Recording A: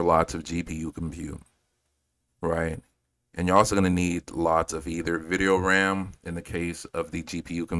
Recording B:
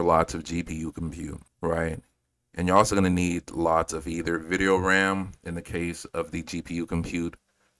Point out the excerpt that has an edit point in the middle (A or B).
B